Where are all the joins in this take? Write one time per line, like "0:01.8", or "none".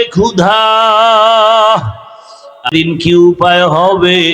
0:02.7